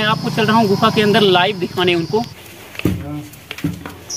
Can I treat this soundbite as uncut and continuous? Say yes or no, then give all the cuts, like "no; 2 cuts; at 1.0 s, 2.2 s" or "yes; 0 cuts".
no; 1 cut; at 2.4 s